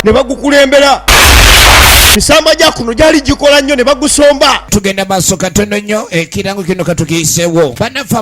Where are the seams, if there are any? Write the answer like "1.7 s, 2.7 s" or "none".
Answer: 4.6 s